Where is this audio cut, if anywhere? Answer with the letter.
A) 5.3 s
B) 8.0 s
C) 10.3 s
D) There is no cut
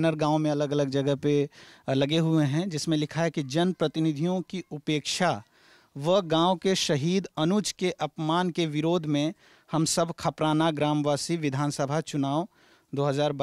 D